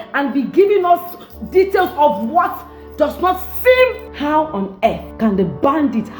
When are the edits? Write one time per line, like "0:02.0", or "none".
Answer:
0:04.1
0:05.1

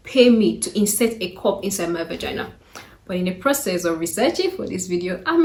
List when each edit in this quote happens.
none

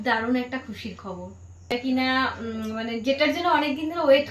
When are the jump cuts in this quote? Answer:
0:01.7

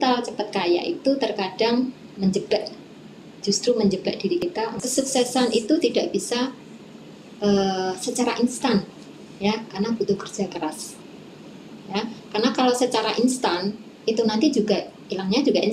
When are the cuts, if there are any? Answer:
0:04.5

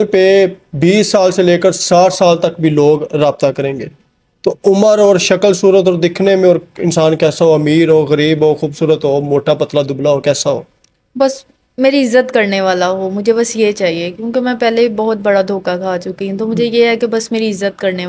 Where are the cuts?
none

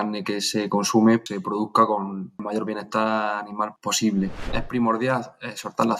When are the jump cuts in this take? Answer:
0:01.3
0:02.4
0:03.7
0:04.6

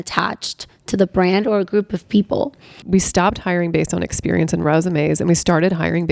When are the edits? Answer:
0:02.7

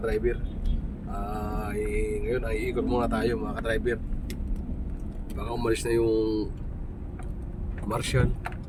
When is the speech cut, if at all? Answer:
none

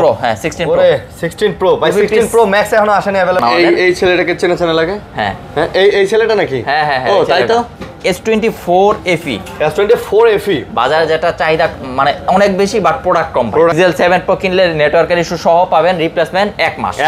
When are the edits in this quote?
0:03.4
0:07.8
0:13.7

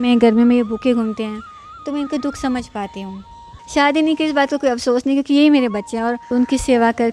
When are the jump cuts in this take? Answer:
0:03.5
0:06.2

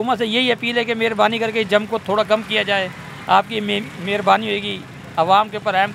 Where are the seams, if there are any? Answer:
none

